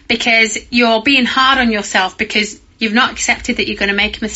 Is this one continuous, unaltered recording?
no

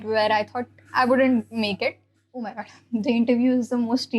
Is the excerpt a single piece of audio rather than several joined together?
no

